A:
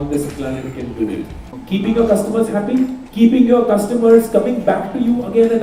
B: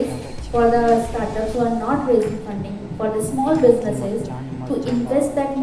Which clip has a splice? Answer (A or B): A